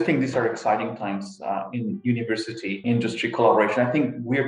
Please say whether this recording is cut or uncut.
cut